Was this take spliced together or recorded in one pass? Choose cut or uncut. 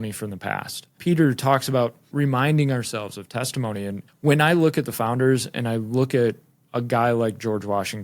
cut